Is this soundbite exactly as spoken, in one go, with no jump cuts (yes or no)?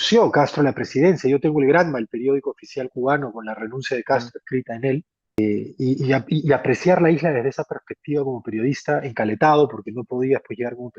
no